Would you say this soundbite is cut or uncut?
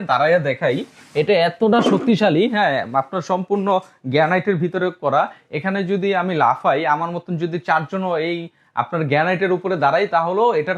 uncut